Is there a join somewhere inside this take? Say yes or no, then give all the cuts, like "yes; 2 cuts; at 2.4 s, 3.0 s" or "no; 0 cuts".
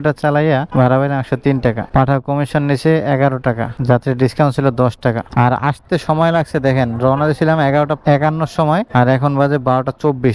no; 0 cuts